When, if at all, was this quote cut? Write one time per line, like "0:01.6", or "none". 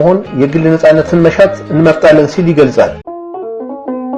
0:03.0